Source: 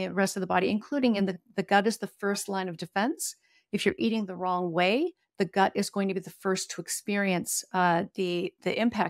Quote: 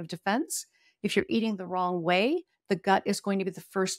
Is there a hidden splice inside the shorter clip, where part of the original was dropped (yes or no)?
no